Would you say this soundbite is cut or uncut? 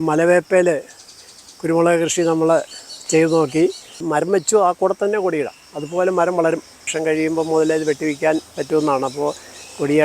cut